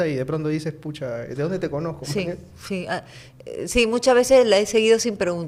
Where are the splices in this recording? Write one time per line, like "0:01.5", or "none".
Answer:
none